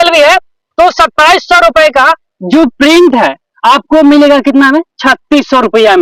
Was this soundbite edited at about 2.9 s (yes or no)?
no